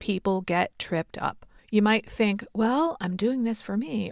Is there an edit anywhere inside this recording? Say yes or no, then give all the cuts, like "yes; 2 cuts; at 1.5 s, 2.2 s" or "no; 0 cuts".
yes; 1 cut; at 1.5 s